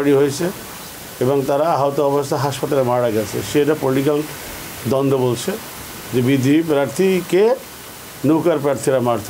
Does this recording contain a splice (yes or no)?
no